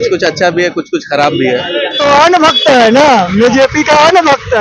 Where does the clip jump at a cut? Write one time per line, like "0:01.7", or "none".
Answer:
0:02.0